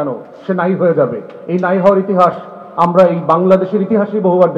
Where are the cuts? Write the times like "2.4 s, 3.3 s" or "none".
none